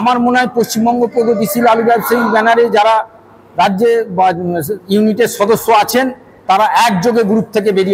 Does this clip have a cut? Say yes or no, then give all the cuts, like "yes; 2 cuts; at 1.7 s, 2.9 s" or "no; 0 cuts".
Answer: no; 0 cuts